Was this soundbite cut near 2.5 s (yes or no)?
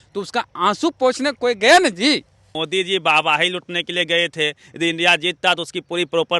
yes